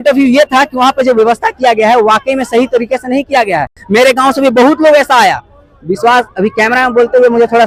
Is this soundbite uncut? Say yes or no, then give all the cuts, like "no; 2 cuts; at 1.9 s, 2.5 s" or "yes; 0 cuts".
yes; 0 cuts